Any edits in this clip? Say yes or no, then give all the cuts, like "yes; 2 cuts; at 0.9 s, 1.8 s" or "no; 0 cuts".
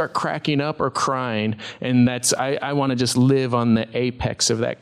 no; 0 cuts